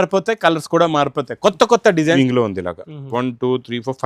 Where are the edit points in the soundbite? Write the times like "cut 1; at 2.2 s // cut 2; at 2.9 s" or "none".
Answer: cut 1; at 2.2 s